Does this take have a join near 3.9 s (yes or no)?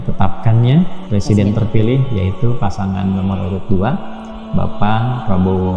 no